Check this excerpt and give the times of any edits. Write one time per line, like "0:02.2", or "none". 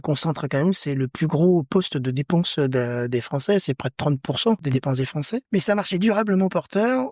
0:05.0